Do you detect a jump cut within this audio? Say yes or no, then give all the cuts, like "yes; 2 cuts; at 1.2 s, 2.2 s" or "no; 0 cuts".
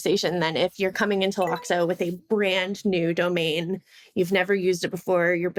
no; 0 cuts